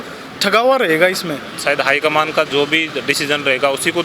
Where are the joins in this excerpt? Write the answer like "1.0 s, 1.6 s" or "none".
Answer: 1.5 s